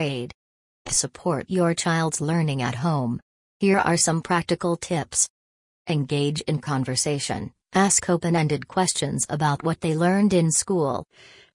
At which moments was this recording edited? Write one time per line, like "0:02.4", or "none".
0:00.9